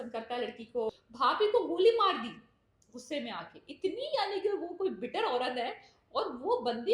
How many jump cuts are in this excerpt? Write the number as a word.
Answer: one